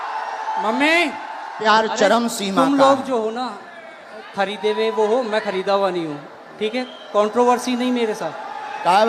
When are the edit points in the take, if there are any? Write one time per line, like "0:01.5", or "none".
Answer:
0:01.6